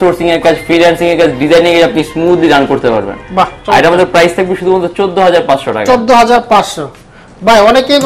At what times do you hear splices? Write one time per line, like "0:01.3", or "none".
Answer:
none